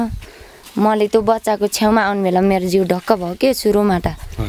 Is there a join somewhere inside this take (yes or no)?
no